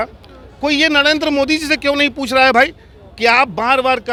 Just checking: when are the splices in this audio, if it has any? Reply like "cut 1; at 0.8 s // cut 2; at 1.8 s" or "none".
none